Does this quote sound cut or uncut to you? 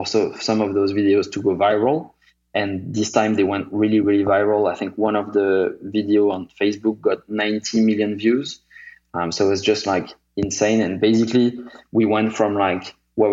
cut